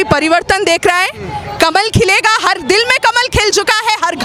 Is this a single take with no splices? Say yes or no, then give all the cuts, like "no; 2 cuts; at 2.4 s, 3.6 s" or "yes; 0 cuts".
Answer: yes; 0 cuts